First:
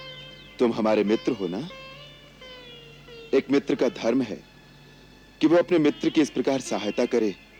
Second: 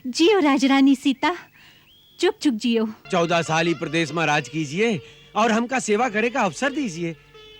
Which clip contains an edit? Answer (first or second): second